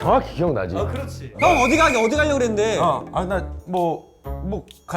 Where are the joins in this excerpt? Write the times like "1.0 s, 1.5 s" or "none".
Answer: 0.9 s